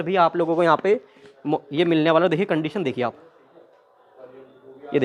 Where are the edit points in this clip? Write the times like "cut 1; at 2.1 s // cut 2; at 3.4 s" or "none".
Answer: none